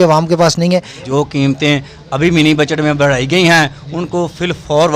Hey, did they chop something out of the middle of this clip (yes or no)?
yes